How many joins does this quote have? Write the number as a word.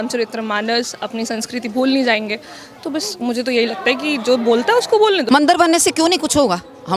one